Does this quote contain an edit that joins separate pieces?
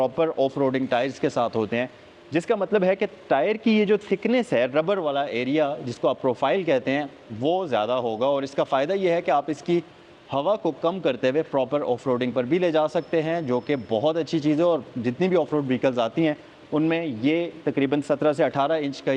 no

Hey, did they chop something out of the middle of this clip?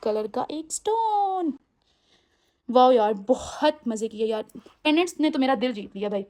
no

